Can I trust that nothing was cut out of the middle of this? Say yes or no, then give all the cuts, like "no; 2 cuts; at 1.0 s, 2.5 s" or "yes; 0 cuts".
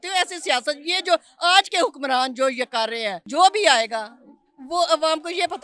no; 1 cut; at 3.2 s